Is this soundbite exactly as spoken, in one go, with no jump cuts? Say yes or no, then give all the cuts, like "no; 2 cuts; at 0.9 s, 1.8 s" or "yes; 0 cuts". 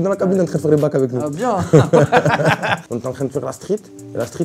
no; 1 cut; at 2.9 s